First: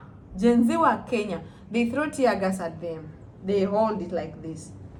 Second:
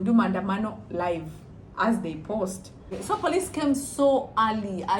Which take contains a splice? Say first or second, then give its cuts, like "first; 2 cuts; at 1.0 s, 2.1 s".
second; 1 cut; at 2.9 s